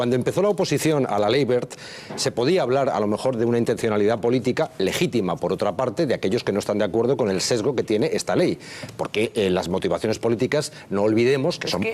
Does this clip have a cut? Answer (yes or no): yes